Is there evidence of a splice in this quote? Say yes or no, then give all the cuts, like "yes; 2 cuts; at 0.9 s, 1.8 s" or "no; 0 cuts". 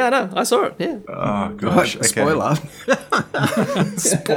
yes; 1 cut; at 1.1 s